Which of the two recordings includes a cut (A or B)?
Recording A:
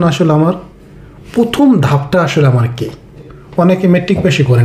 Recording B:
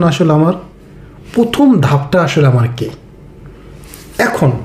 A